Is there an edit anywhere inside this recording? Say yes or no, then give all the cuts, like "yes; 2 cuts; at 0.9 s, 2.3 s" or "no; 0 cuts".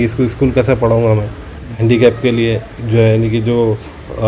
yes; 1 cut; at 1.7 s